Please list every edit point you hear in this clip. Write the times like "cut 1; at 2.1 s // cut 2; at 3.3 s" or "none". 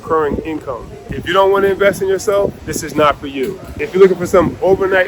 cut 1; at 1.2 s // cut 2; at 2.7 s // cut 3; at 3.7 s